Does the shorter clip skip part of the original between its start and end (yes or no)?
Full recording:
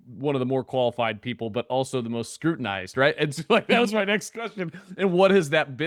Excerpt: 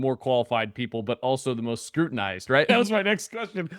yes